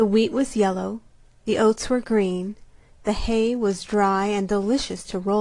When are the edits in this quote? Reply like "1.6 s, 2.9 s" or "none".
1.8 s